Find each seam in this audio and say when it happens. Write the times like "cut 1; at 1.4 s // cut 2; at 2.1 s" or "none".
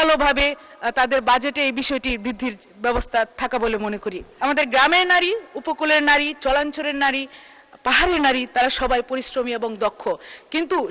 cut 1; at 4.2 s